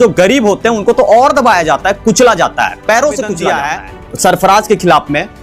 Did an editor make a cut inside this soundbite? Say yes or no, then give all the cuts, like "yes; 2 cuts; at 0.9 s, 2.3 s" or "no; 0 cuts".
yes; 1 cut; at 3.4 s